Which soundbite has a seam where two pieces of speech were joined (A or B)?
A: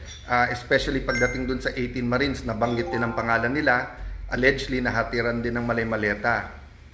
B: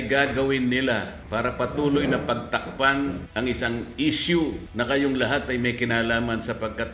B